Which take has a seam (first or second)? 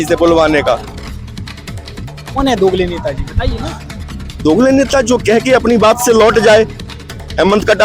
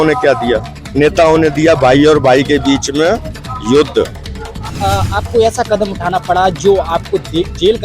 second